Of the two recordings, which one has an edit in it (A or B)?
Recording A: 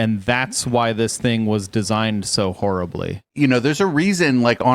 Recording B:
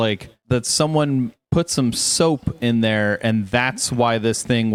A